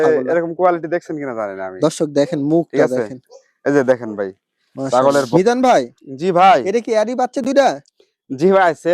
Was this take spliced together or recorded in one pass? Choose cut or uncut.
cut